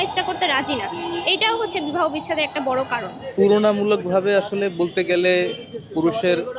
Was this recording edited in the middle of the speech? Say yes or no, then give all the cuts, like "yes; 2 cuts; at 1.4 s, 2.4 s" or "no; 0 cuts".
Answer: yes; 1 cut; at 3.2 s